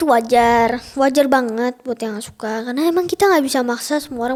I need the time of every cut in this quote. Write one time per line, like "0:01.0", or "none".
none